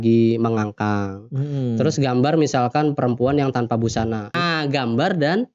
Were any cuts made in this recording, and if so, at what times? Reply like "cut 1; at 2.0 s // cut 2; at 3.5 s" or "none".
cut 1; at 4.3 s